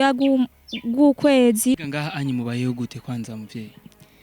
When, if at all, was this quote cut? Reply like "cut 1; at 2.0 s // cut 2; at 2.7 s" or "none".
cut 1; at 1.8 s